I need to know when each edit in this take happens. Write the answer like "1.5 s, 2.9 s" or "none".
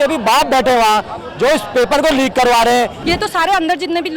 3.0 s